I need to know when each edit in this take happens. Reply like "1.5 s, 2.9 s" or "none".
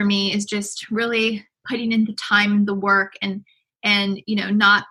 none